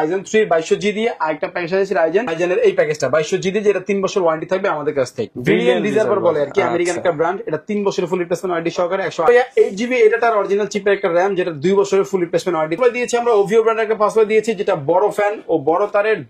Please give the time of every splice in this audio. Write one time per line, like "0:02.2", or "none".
0:02.2
0:05.3
0:09.3
0:12.7